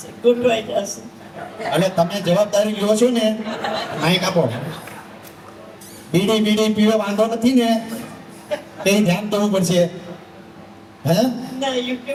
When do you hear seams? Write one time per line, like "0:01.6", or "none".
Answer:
none